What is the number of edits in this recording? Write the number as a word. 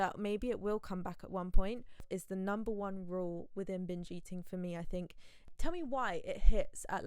two